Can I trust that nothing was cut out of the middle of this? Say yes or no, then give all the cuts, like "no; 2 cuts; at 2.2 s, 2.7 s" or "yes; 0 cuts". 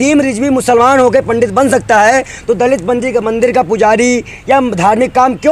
yes; 0 cuts